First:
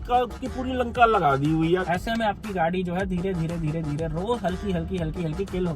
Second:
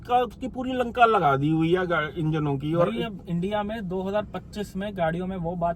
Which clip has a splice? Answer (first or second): first